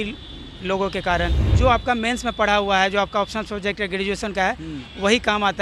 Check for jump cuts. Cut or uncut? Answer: cut